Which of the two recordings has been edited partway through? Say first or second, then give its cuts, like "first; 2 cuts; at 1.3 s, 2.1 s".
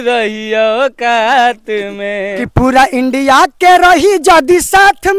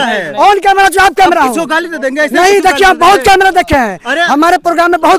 first; 1 cut; at 2.3 s